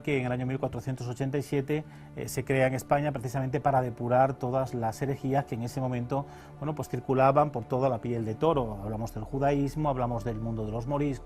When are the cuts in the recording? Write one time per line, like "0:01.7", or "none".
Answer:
0:04.7